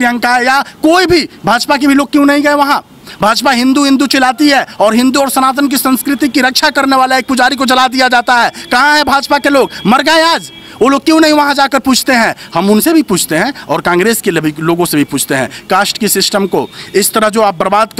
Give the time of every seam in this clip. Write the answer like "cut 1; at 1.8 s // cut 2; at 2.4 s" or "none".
none